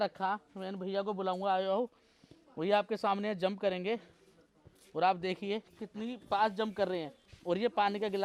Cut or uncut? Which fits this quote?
uncut